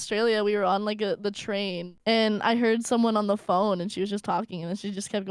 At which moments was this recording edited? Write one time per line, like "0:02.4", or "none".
0:01.9

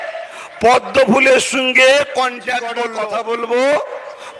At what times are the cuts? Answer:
0:02.8

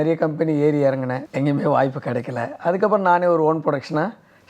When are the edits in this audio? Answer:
0:01.2

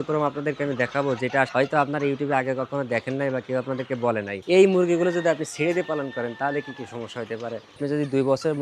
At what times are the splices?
0:01.5
0:04.4
0:07.7

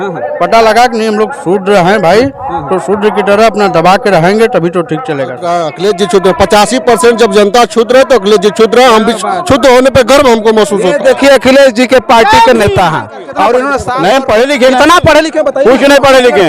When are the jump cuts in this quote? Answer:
0:05.5
0:13.9

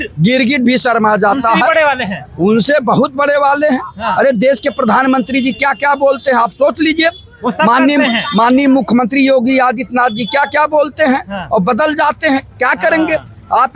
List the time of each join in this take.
none

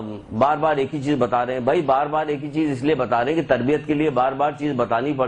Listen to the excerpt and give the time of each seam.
0:02.5

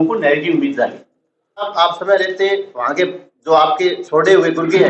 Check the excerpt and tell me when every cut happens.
0:01.7

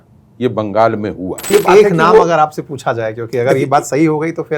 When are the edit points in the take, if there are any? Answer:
0:01.5

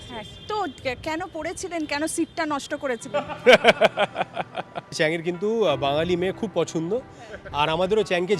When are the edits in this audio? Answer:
0:05.0

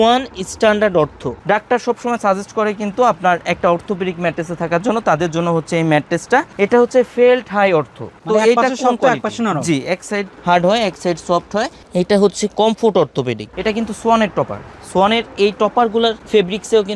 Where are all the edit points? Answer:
0:01.4
0:06.5
0:08.1
0:13.4

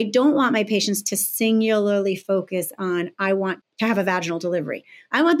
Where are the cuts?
0:03.7

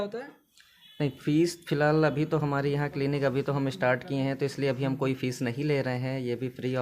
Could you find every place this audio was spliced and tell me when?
none

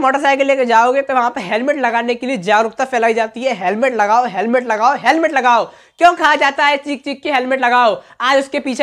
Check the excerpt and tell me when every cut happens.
none

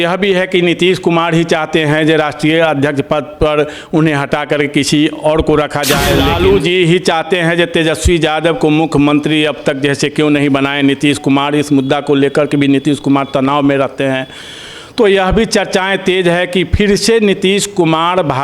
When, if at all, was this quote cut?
0:06.3

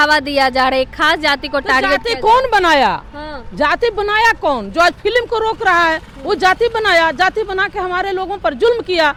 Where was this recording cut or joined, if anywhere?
none

